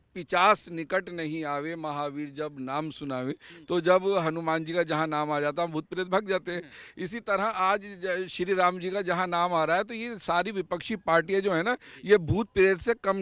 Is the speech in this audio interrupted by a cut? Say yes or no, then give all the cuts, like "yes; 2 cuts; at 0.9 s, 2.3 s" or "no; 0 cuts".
no; 0 cuts